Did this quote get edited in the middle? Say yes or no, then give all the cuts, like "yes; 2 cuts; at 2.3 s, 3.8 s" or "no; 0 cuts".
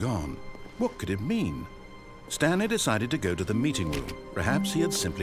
no; 0 cuts